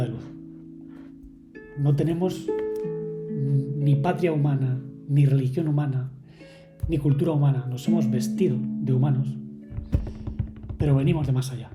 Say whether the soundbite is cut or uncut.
uncut